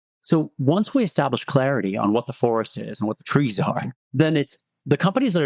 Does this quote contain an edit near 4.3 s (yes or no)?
yes